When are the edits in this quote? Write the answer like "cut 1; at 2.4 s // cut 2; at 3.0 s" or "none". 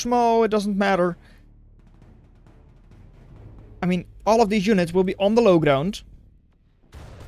none